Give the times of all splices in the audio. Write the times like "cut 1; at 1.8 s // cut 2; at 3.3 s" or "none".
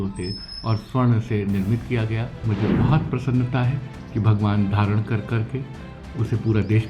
cut 1; at 2.5 s